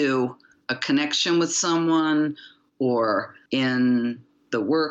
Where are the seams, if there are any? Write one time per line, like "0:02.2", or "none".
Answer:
0:03.4